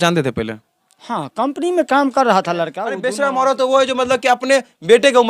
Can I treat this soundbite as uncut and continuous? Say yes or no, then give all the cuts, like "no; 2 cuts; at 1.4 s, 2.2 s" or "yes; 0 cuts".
no; 1 cut; at 2.9 s